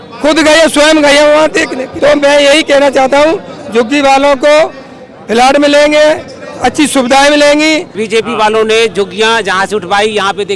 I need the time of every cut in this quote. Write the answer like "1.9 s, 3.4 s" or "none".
1.8 s, 8.0 s